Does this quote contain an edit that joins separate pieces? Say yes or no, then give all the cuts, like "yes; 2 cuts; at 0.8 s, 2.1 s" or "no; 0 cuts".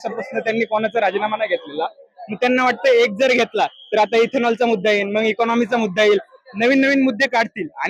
no; 0 cuts